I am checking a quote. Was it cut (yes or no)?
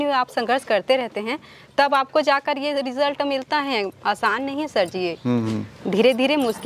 no